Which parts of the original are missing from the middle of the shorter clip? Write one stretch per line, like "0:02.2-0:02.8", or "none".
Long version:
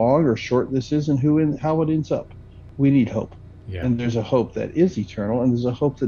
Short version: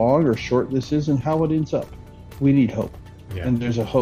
0:01.2-0:01.6

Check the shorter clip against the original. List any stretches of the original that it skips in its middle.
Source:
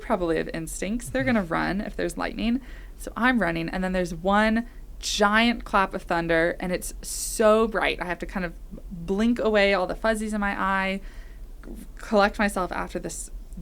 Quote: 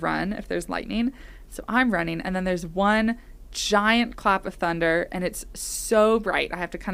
none

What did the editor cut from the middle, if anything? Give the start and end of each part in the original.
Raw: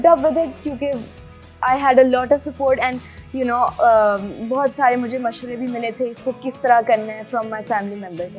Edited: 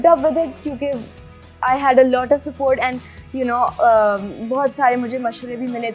none

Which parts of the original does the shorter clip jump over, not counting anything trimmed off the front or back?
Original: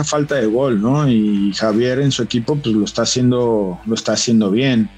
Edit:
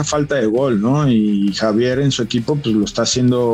none

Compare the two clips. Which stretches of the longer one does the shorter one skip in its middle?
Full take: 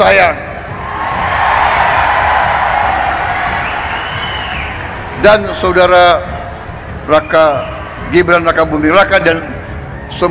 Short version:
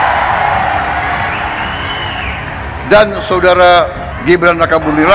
0:06.4-0:07.9

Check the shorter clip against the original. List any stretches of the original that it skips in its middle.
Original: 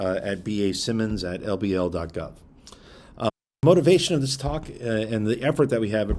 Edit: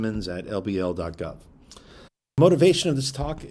0:03.1-0:03.4

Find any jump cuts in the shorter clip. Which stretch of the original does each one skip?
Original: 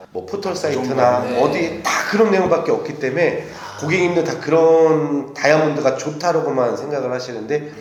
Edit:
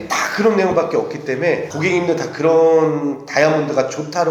0:03.4-0:03.8

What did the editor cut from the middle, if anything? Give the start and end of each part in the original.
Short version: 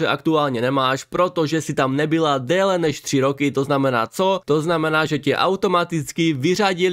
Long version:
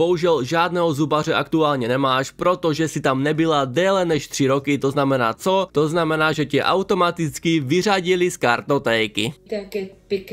none

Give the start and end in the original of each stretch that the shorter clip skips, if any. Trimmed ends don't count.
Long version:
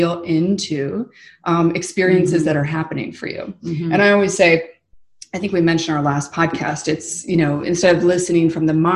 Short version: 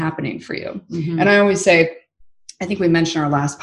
none

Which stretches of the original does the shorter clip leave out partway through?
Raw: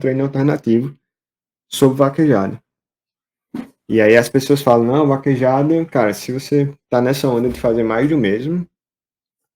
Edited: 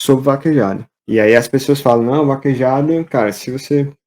0:02.6-0:03.7

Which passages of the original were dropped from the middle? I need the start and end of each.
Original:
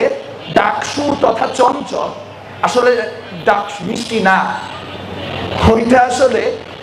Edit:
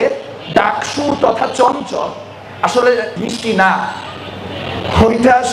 0:03.2-0:03.8

